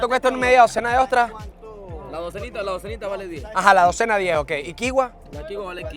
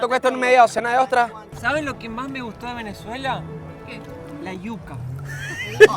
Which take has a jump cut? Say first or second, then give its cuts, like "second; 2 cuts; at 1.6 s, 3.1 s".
second; 1 cut; at 1.5 s